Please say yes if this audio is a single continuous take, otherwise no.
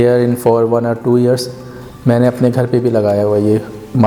yes